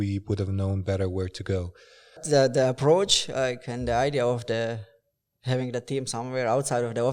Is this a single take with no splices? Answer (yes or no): no